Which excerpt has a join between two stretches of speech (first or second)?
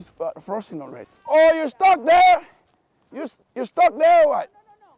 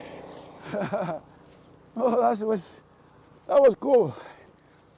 first